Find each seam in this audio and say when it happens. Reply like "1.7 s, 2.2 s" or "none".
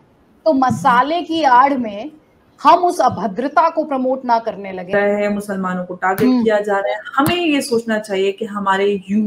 4.9 s